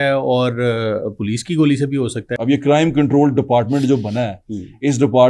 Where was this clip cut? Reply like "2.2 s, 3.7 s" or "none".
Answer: 2.2 s